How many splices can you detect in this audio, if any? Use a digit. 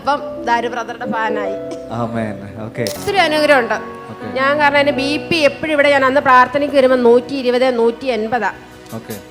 1